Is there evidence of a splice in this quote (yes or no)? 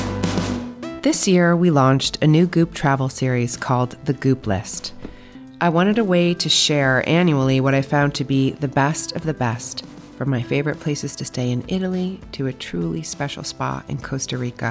yes